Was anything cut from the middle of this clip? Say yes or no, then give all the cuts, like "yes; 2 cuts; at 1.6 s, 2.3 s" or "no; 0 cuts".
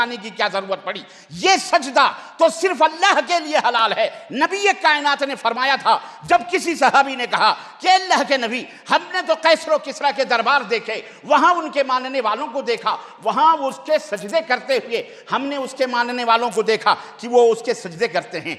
no; 0 cuts